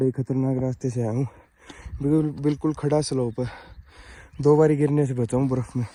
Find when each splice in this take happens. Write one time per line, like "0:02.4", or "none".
none